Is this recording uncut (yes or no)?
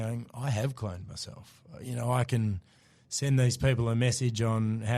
yes